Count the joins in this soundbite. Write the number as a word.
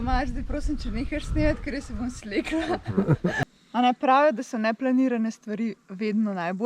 one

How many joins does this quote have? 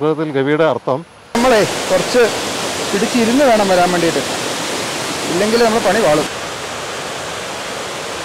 two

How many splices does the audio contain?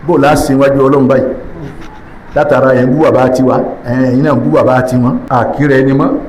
one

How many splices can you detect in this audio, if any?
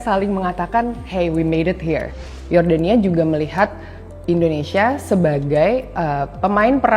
one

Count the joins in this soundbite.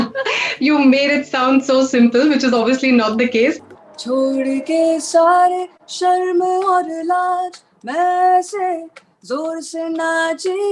one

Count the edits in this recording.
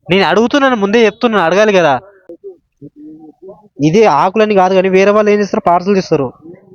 one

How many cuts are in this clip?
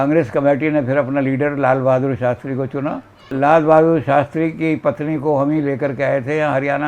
one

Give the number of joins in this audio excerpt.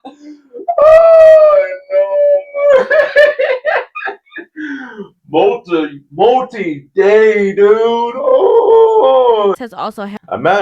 one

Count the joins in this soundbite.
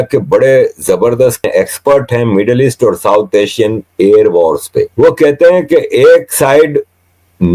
two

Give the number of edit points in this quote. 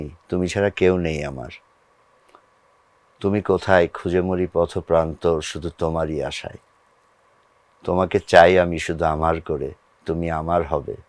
zero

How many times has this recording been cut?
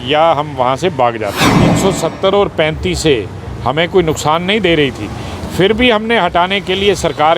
one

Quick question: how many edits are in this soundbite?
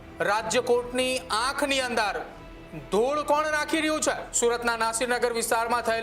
one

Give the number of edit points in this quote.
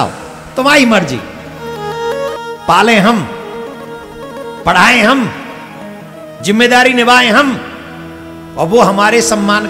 one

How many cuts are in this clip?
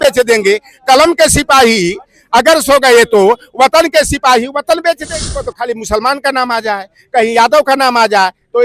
one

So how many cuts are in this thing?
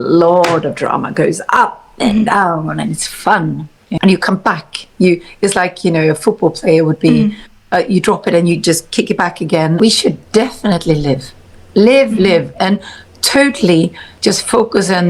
two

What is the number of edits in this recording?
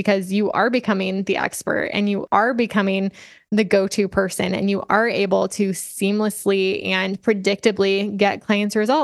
one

